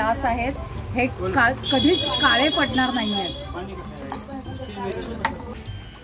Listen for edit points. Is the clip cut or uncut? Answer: uncut